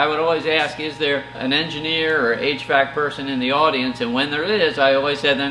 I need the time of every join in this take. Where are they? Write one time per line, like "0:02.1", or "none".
0:01.4

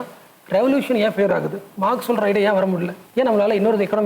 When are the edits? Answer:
0:01.6
0:03.0

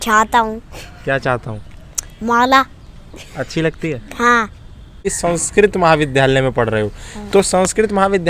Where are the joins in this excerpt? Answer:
0:05.1

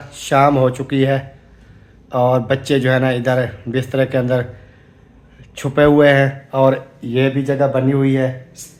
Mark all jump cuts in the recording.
none

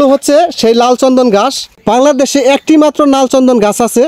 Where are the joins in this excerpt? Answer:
0:01.8

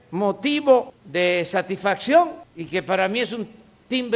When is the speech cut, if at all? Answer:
0:01.0
0:02.5

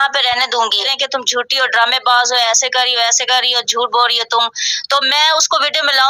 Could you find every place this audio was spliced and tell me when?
0:01.0

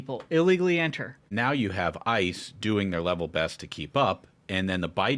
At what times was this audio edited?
0:01.3

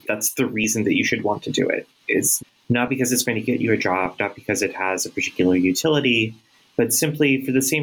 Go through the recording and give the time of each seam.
none

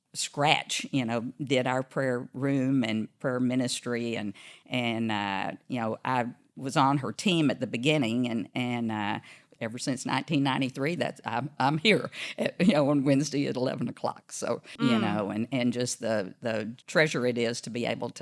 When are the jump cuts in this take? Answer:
0:09.5
0:14.7
0:16.8

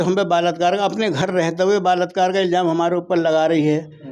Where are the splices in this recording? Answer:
none

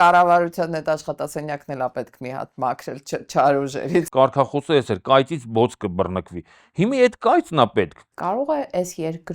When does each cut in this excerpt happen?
0:04.1
0:08.0

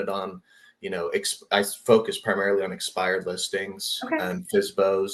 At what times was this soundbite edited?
none

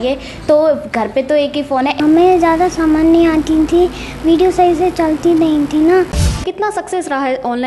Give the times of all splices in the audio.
0:01.9
0:06.3

